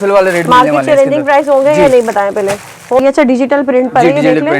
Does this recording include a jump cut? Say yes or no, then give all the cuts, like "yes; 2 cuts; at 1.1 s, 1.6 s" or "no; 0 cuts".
yes; 1 cut; at 3.0 s